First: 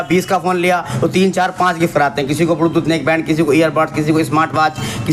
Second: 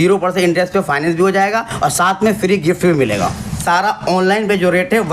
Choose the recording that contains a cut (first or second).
second